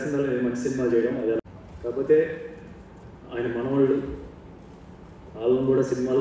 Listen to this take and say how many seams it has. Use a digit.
1